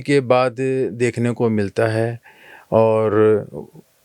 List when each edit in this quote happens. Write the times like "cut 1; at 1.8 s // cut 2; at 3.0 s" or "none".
none